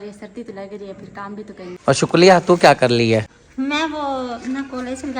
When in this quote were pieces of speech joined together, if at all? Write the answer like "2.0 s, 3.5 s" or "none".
1.7 s, 3.4 s